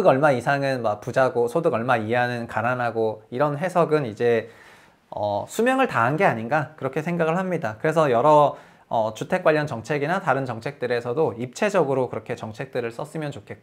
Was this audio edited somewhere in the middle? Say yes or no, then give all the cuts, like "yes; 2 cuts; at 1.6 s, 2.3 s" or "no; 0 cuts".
no; 0 cuts